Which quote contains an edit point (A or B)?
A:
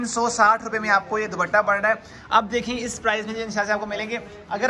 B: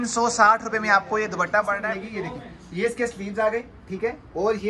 B